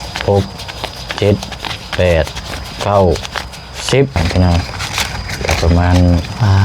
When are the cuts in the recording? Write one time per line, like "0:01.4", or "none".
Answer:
0:04.2